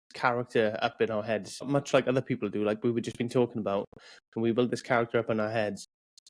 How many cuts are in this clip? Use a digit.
1